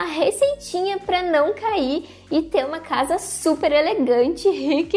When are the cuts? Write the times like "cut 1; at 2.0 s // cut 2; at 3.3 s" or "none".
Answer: none

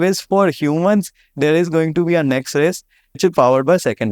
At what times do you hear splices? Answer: cut 1; at 3.0 s

